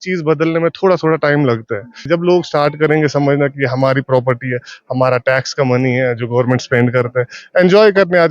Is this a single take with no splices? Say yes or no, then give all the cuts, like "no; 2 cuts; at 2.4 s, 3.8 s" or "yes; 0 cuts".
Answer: no; 1 cut; at 2.0 s